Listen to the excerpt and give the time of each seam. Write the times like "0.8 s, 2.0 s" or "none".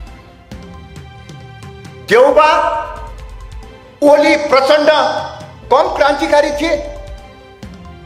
none